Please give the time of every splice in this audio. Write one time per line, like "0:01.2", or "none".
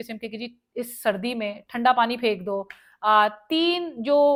none